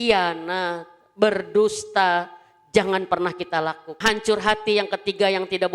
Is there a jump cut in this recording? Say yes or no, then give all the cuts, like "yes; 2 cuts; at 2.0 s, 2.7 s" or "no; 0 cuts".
yes; 1 cut; at 4.0 s